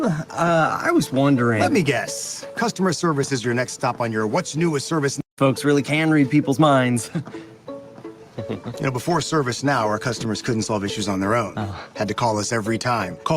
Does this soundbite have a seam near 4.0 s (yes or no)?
no